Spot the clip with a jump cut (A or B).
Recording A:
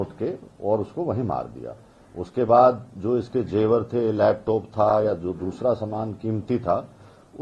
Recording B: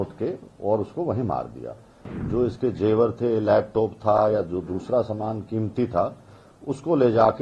B